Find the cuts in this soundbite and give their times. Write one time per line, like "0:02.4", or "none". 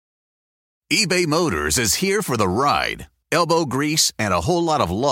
none